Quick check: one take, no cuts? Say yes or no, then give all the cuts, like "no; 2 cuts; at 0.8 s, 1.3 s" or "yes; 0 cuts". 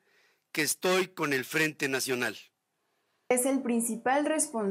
no; 1 cut; at 3.3 s